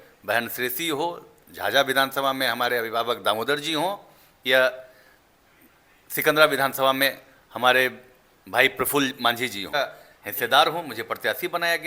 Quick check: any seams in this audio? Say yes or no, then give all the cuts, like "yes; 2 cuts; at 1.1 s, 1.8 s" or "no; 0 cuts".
yes; 1 cut; at 9.7 s